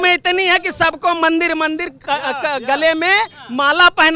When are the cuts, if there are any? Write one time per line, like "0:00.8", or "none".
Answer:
none